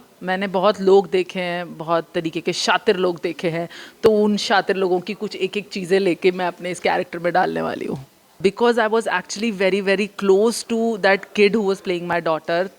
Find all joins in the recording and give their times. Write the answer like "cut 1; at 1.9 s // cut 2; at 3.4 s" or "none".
cut 1; at 8.4 s

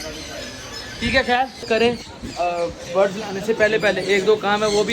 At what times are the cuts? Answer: cut 1; at 1.7 s

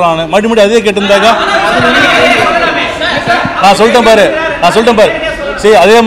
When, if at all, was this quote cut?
none

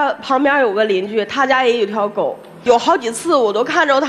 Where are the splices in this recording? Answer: none

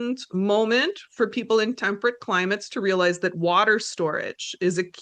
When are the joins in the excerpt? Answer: none

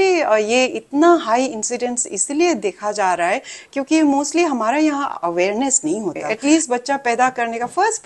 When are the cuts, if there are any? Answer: cut 1; at 6.2 s

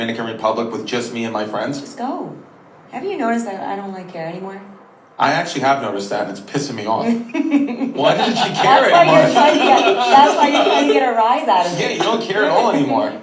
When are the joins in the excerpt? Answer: cut 1; at 7.7 s

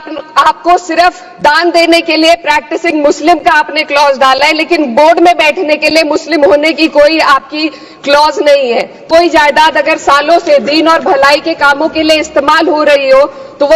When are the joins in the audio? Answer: cut 1; at 9.0 s

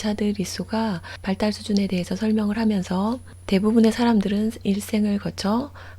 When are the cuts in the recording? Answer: cut 1; at 1.1 s

